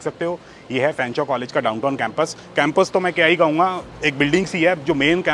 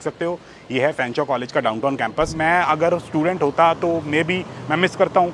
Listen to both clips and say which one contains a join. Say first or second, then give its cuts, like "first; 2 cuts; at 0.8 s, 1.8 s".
second; 1 cut; at 2.3 s